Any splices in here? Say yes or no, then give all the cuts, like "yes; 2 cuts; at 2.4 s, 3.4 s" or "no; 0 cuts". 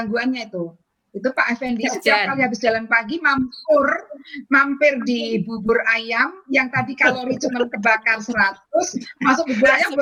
no; 0 cuts